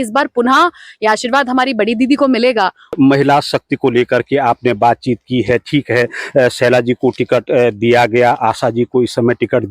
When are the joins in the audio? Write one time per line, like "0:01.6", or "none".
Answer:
0:03.0